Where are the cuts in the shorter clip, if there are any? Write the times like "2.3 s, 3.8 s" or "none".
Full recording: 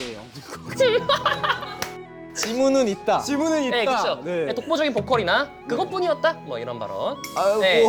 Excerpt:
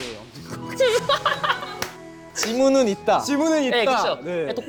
none